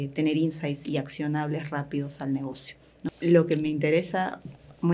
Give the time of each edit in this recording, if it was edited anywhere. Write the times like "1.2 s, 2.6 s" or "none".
3.0 s